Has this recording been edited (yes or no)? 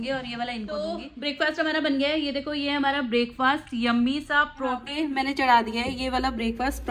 yes